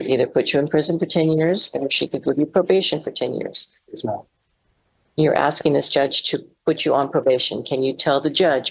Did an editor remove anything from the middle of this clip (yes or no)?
no